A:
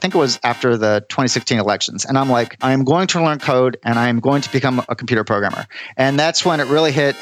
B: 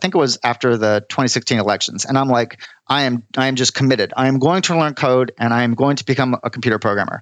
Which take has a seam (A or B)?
A